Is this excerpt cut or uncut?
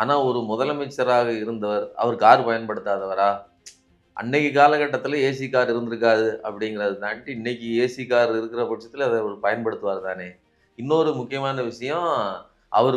uncut